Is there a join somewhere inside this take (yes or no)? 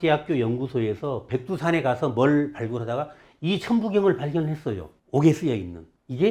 no